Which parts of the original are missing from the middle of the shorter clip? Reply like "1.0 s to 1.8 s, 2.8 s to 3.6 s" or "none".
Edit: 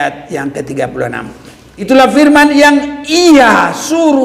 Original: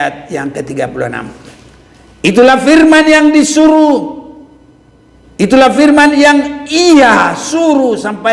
1.9 s to 5.5 s